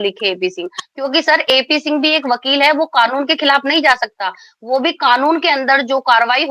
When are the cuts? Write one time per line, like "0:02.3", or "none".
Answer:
none